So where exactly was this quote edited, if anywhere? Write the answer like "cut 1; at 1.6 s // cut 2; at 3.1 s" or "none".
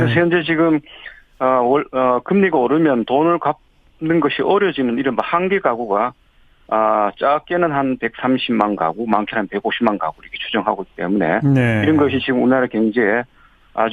cut 1; at 8.0 s